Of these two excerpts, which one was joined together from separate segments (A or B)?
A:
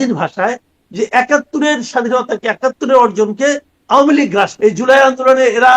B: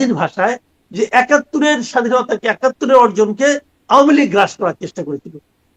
A